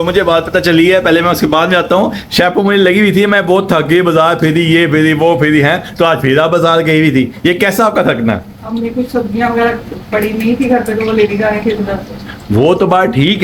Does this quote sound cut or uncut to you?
uncut